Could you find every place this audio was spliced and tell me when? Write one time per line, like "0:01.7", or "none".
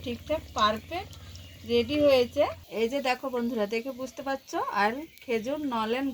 0:02.6